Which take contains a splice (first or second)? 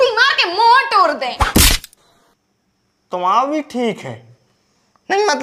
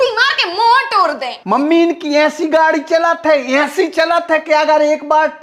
second